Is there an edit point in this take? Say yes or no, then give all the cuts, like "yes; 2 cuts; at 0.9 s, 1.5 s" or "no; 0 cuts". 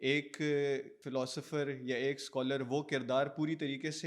yes; 1 cut; at 1.0 s